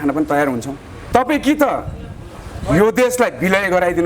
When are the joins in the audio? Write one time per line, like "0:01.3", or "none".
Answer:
0:00.9